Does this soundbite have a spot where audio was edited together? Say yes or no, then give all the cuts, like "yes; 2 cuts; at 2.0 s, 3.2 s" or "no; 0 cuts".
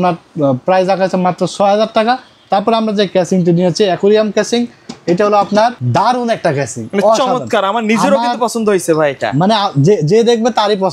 no; 0 cuts